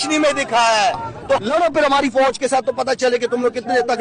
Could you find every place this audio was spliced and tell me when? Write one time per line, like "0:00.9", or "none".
0:01.4